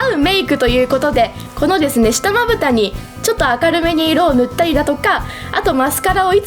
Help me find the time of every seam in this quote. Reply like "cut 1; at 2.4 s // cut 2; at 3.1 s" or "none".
none